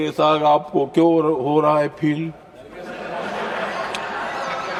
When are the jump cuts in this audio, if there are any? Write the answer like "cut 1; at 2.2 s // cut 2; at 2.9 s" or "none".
none

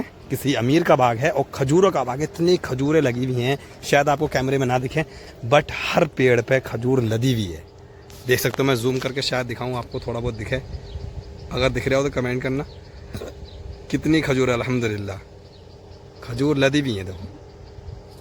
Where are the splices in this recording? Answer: none

